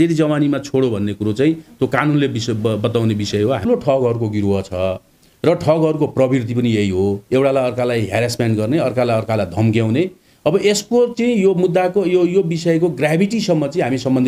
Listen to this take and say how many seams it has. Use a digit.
1